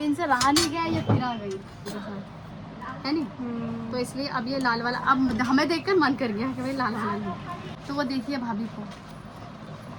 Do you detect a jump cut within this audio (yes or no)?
no